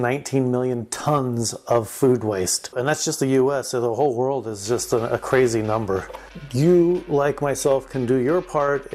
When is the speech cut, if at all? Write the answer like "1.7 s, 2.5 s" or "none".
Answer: 2.7 s